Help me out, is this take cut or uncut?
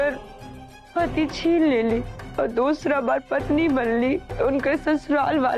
cut